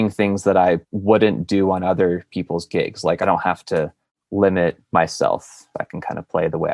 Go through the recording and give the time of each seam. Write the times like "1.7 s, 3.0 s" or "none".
0.9 s

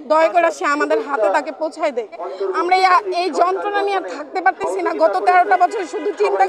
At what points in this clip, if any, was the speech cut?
2.2 s

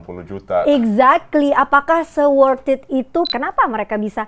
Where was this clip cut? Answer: 3.3 s

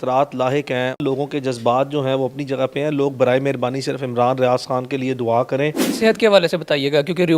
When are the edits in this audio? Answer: 1.0 s, 5.8 s

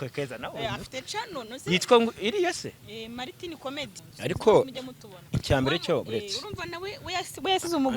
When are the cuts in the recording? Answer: 3.9 s

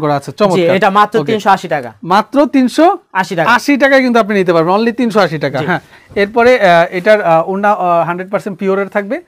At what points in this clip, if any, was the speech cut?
none

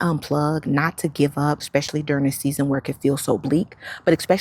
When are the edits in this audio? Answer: 1.6 s

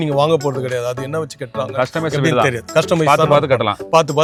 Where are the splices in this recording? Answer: none

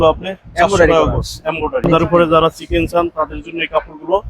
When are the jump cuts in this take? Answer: 1.9 s

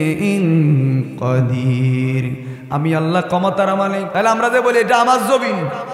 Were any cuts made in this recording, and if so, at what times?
4.1 s

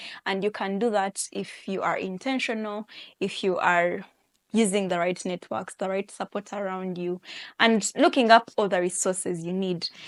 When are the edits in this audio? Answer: none

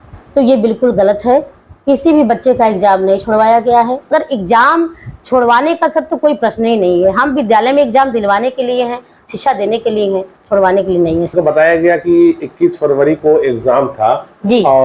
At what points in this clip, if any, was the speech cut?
4.1 s, 11.3 s

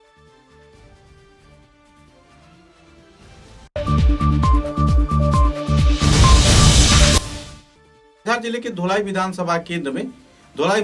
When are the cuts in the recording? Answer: none

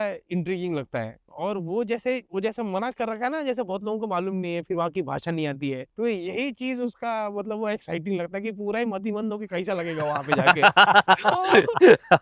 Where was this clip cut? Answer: 1.2 s, 2.2 s, 5.9 s

